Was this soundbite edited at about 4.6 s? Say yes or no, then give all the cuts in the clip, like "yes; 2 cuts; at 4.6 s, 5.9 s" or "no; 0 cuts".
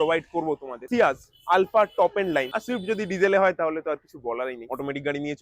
yes; 3 cuts; at 0.8 s, 2.5 s, 4.6 s